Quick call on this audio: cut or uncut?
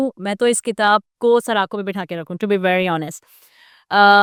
uncut